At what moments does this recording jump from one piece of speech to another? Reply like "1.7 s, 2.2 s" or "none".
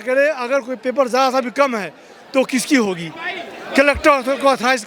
none